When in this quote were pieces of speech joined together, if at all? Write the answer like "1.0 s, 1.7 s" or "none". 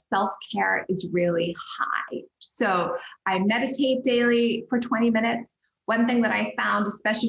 none